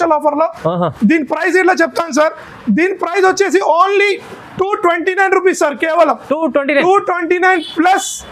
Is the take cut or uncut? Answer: uncut